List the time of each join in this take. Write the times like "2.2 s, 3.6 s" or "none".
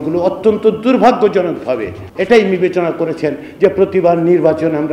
2.0 s